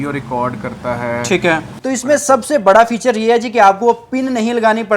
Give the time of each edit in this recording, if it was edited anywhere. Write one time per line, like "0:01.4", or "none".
0:01.7